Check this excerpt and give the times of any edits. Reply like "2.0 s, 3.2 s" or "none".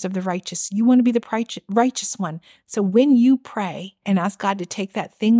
none